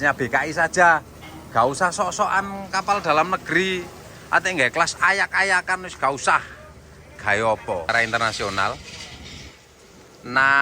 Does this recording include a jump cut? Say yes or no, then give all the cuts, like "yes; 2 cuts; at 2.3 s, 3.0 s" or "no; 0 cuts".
yes; 1 cut; at 7.9 s